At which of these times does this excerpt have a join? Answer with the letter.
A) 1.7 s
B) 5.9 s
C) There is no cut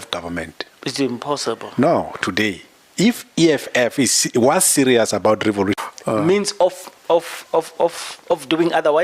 B